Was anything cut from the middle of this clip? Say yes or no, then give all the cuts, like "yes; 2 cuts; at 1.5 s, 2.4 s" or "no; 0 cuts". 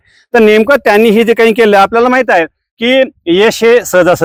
no; 0 cuts